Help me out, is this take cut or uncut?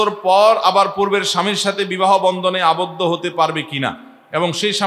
uncut